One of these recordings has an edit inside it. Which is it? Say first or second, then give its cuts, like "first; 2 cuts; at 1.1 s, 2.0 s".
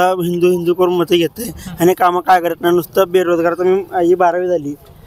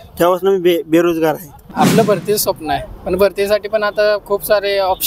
second; 1 cut; at 1.6 s